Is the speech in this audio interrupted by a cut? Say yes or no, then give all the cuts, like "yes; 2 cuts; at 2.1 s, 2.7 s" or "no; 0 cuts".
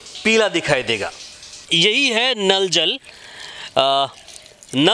yes; 1 cut; at 1.6 s